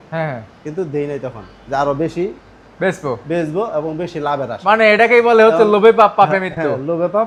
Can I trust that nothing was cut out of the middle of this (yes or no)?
yes